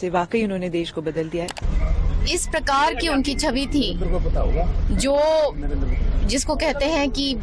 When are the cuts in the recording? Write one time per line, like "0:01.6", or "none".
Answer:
0:01.6